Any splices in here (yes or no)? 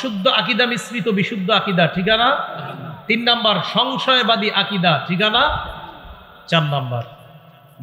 no